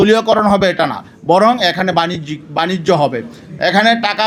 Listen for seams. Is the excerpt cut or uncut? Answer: uncut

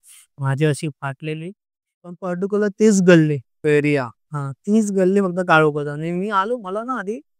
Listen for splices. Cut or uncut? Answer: cut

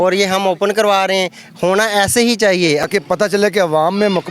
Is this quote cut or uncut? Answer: cut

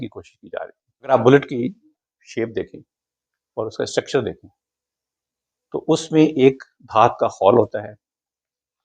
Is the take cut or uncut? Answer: cut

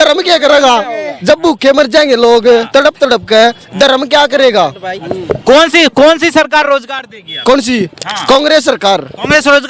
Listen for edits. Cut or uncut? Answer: uncut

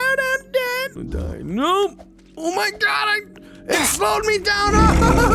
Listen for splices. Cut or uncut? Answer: cut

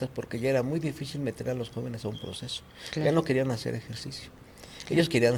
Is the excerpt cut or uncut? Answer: uncut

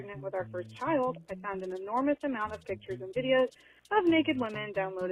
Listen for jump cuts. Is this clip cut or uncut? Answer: uncut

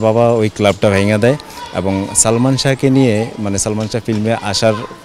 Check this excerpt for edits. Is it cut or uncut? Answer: uncut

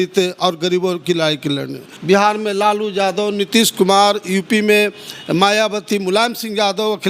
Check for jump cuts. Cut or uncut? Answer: cut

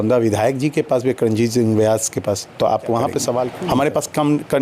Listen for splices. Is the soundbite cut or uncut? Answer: cut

